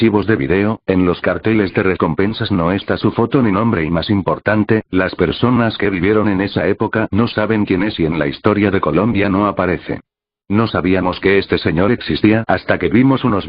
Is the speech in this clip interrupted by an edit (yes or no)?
no